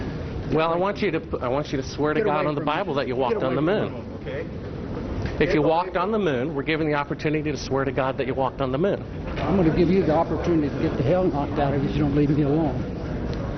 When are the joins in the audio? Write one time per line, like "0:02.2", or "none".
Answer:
none